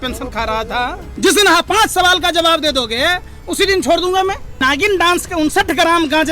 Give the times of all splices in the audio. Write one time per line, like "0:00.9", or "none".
0:01.0
0:04.6